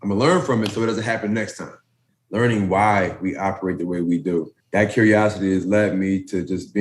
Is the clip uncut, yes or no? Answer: no